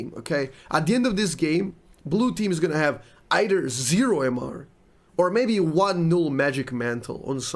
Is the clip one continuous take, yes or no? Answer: yes